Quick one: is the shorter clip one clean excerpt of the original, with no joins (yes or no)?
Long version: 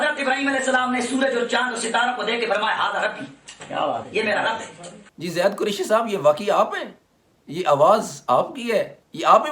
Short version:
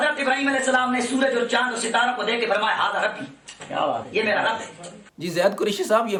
yes